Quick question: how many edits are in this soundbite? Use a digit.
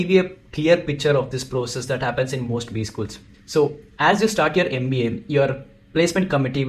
0